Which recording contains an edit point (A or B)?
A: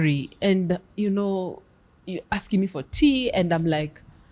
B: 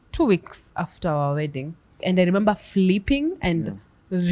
B